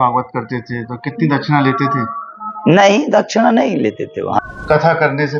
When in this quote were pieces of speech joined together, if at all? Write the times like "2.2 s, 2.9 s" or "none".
4.4 s